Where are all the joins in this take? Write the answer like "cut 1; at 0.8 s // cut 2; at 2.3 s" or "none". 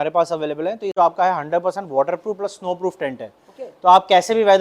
cut 1; at 0.9 s